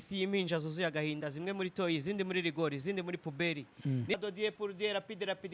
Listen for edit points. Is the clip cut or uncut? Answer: cut